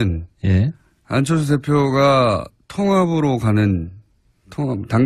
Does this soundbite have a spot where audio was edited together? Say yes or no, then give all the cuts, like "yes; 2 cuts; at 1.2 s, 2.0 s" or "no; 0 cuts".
yes; 1 cut; at 2.7 s